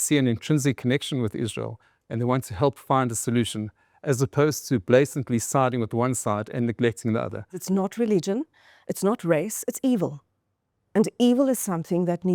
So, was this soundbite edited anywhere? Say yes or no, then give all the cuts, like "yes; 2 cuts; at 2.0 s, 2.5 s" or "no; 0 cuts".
yes; 1 cut; at 7.6 s